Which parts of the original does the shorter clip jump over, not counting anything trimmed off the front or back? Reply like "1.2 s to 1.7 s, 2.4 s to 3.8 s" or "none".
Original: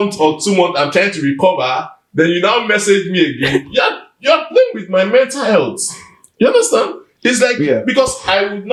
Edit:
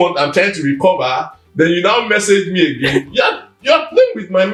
none